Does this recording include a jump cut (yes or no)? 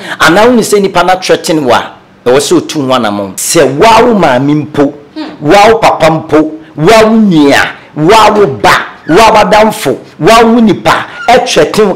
yes